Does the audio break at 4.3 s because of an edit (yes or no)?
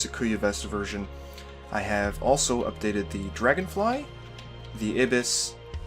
no